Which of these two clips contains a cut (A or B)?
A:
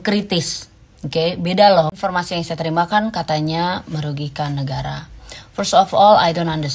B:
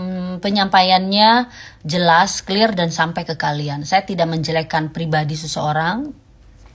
A